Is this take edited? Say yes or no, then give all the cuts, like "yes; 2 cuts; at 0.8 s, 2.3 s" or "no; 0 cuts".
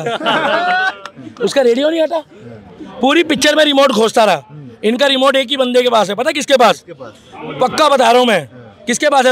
no; 0 cuts